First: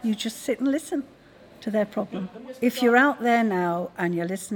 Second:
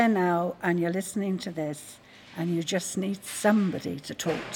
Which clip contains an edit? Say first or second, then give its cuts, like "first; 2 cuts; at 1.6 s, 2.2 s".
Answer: first; 1 cut; at 2.1 s